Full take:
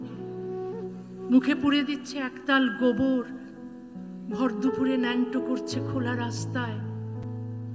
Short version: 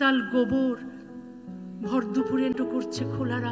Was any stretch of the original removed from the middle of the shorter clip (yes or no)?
yes